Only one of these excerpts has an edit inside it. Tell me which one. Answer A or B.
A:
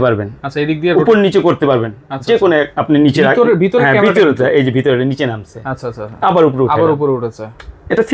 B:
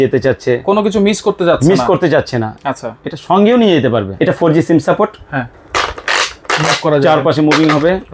B